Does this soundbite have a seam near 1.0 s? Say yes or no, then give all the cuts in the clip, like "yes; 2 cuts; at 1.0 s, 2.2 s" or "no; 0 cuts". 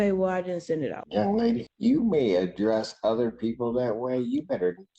yes; 2 cuts; at 1.0 s, 1.7 s